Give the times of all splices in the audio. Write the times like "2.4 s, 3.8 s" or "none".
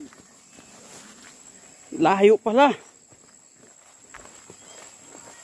1.4 s